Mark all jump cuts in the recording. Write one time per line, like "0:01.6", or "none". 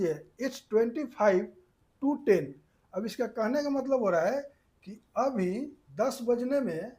0:05.8